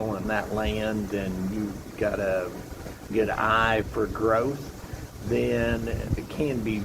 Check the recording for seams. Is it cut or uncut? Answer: cut